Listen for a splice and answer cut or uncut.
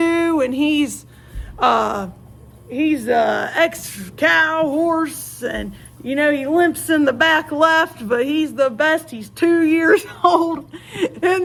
uncut